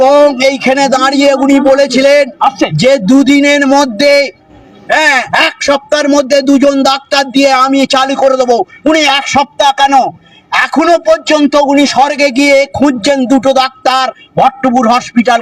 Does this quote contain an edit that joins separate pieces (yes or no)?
no